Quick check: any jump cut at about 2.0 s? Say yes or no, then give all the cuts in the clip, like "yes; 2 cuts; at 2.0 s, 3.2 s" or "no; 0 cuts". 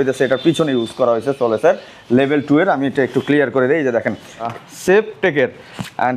no; 1 cut; at 4.5 s